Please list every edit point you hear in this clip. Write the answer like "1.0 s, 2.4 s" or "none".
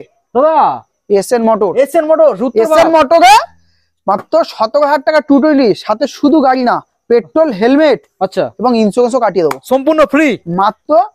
none